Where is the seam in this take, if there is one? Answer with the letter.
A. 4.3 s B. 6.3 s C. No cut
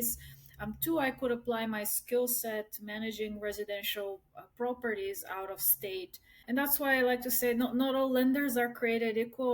B